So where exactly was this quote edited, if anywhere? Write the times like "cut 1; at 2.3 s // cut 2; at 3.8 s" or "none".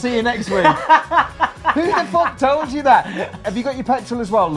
cut 1; at 3.4 s